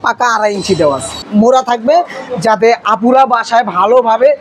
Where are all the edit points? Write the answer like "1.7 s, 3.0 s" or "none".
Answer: 1.2 s

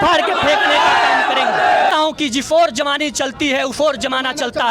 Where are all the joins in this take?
1.9 s

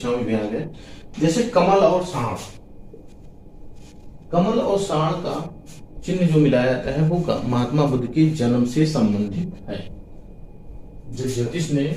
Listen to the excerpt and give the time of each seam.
none

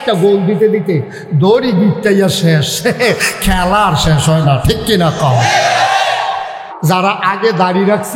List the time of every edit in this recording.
6.6 s

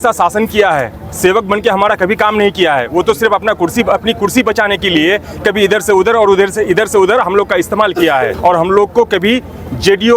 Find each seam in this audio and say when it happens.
8.3 s

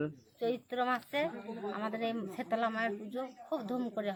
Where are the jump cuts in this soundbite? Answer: none

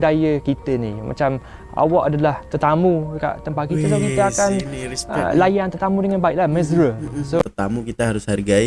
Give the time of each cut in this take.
7.4 s

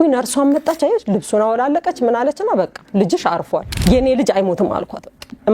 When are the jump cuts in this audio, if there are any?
3.7 s

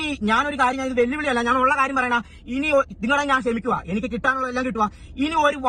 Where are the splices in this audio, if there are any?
none

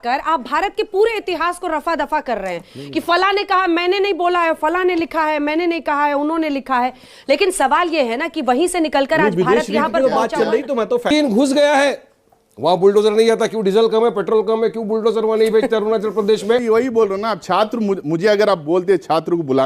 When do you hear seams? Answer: 11.1 s, 16.6 s

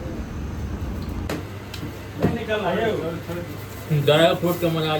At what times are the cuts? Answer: 1.3 s

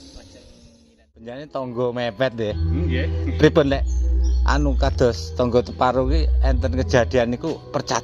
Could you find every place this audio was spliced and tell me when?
1.4 s

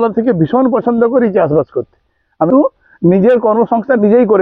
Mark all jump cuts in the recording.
2.5 s

